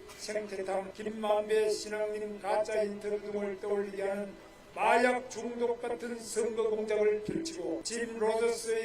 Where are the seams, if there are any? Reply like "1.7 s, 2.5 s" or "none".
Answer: 0.9 s, 7.9 s